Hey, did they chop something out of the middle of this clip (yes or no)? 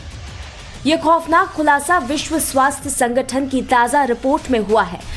yes